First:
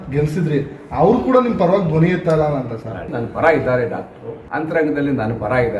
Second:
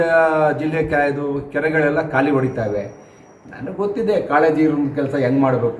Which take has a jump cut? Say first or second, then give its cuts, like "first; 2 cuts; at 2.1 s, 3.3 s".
first; 2 cuts; at 3.1 s, 4.4 s